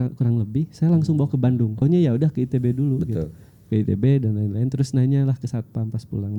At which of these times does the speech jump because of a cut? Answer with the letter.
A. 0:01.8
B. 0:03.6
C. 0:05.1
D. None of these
A